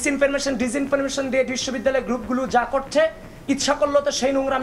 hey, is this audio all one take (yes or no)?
yes